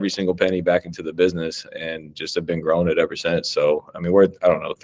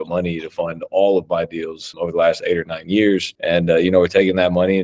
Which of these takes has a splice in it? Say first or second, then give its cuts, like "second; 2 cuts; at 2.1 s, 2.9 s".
second; 2 cuts; at 1.8 s, 3.3 s